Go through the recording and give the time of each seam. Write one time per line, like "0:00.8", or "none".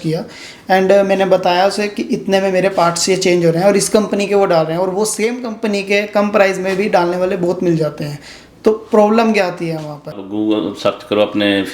0:10.2